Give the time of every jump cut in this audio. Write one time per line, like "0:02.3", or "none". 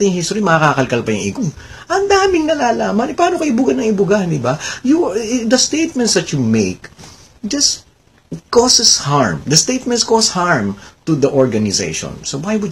none